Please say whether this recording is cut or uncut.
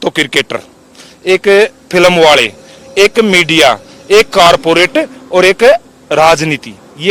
uncut